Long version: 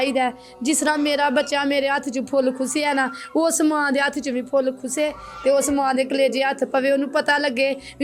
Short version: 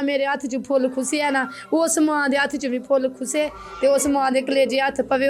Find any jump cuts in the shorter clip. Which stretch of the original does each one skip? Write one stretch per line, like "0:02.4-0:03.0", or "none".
none